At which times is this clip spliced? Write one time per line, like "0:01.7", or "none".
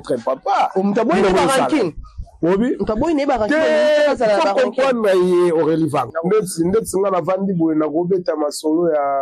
0:06.1